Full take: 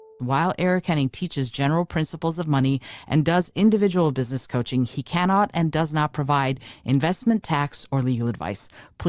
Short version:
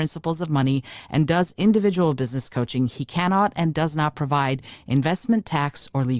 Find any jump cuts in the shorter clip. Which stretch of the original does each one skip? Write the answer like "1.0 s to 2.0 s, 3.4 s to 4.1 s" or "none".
none